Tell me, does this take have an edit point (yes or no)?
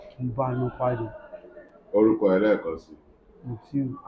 no